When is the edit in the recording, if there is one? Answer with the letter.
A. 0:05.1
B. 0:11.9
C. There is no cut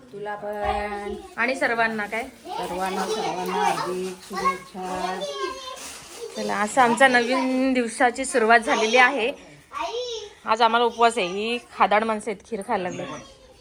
C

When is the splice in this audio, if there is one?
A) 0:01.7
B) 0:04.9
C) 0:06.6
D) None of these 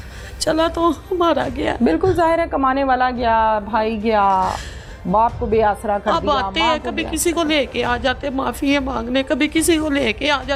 D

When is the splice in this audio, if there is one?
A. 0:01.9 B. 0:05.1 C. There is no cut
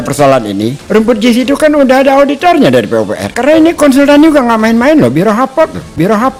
C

